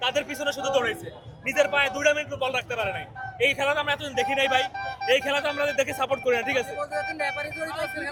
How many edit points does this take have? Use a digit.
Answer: 0